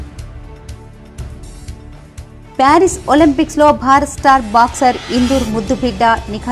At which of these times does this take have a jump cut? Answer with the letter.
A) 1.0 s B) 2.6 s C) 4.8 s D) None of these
B